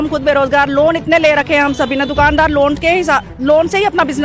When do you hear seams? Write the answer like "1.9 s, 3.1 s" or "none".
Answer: none